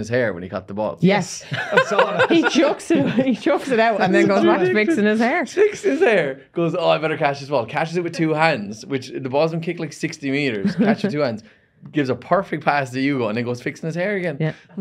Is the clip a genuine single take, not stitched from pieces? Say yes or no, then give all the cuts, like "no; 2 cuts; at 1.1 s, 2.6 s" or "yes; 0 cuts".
yes; 0 cuts